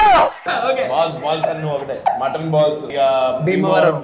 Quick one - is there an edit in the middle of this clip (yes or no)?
yes